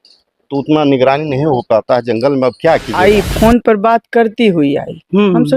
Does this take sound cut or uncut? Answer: cut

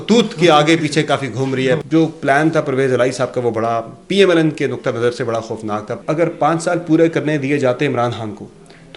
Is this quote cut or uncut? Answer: cut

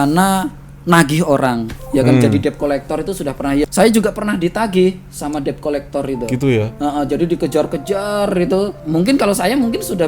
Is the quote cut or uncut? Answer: cut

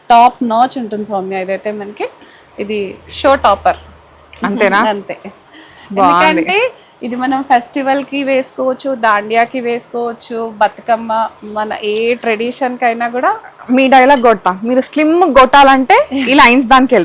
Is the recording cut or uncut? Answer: uncut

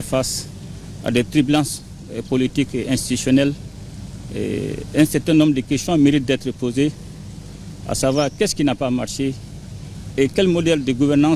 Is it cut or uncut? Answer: uncut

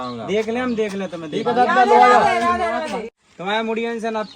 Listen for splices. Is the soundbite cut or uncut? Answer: cut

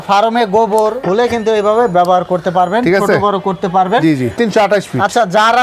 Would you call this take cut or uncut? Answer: cut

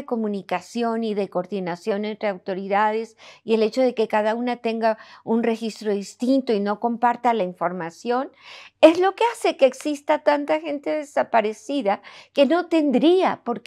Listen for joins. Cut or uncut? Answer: uncut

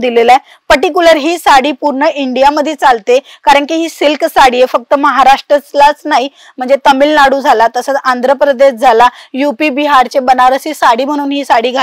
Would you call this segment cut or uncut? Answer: uncut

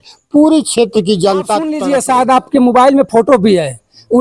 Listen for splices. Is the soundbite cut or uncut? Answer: cut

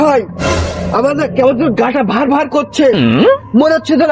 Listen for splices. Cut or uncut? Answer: uncut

